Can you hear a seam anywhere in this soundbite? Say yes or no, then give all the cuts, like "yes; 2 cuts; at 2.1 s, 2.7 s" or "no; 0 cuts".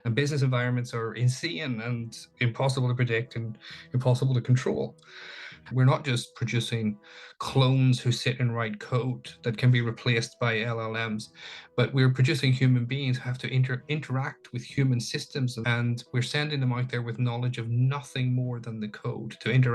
yes; 2 cuts; at 5.7 s, 15.6 s